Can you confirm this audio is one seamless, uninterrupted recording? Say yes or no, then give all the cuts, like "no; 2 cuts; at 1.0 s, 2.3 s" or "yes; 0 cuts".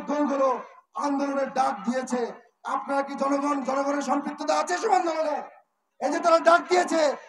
yes; 0 cuts